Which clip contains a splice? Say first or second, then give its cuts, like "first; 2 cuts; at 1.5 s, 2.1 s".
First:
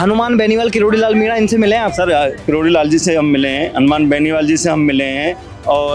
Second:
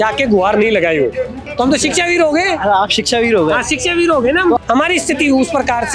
second; 2 cuts; at 1.4 s, 4.6 s